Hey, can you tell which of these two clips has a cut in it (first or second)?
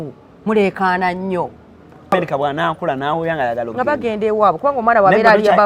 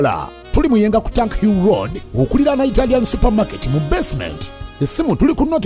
first